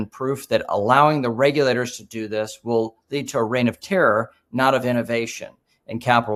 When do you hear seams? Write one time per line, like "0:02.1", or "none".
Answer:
none